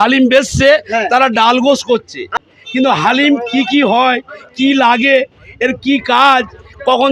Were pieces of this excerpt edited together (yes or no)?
no